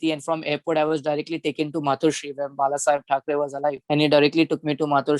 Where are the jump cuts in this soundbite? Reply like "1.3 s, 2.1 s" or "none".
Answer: 3.8 s